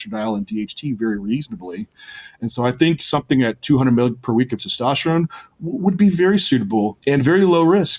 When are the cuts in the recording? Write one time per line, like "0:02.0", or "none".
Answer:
0:07.0